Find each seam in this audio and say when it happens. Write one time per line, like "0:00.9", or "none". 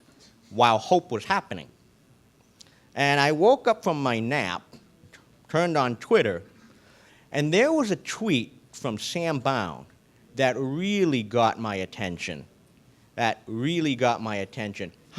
0:14.2